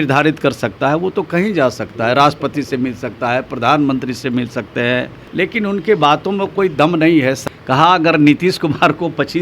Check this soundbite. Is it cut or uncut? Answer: cut